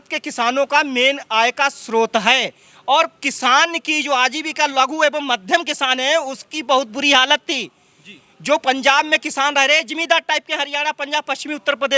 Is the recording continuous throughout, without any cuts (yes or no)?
yes